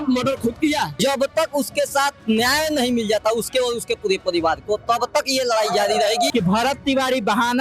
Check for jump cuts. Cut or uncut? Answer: cut